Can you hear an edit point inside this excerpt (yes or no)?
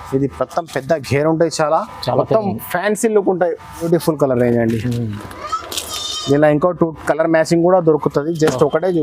yes